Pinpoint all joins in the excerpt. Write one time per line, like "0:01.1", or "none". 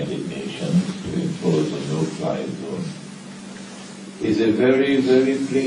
0:01.0